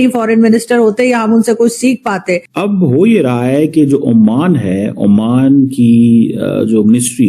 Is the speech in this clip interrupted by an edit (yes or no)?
yes